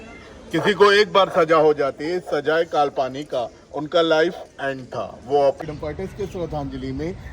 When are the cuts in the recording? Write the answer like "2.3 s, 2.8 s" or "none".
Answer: 5.6 s